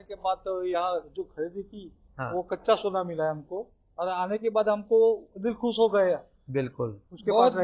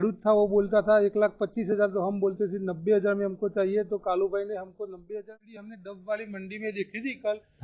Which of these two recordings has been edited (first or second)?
second